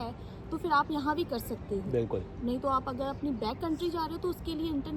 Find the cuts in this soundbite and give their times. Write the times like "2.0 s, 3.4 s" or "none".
none